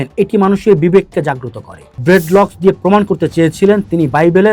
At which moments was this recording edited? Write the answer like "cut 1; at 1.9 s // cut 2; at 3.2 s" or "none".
cut 1; at 1.9 s